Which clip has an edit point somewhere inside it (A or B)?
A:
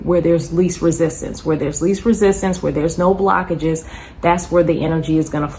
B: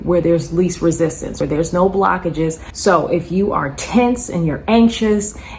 B